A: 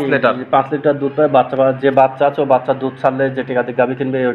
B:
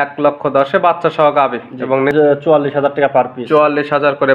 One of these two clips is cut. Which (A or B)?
B